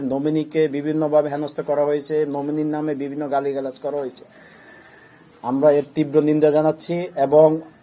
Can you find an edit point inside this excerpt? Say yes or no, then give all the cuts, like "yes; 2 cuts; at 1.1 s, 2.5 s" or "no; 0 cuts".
no; 0 cuts